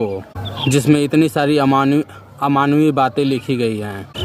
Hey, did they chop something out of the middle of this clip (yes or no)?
no